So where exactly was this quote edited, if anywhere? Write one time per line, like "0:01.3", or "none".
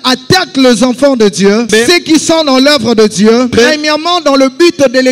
0:01.7
0:03.5